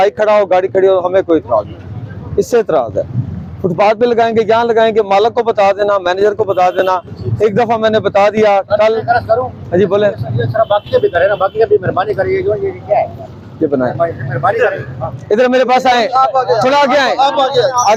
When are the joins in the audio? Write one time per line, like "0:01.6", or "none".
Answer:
none